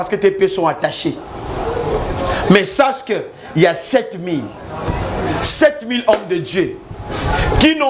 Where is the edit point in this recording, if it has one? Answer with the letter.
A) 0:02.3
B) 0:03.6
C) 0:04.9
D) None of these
D